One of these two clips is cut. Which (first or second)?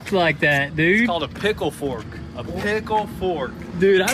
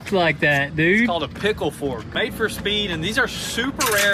second